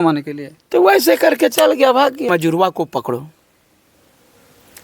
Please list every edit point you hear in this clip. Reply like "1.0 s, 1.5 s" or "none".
2.3 s